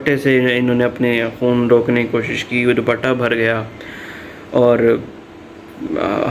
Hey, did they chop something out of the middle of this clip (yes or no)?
no